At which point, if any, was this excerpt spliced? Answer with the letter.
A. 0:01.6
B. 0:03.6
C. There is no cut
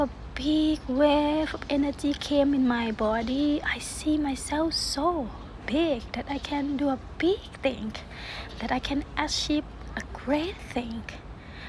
B